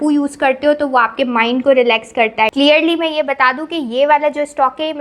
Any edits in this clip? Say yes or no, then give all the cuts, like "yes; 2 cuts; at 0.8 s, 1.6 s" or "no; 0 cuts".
yes; 1 cut; at 2.5 s